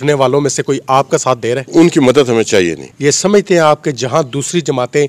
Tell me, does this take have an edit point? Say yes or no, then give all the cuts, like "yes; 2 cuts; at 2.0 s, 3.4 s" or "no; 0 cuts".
yes; 2 cuts; at 1.6 s, 2.9 s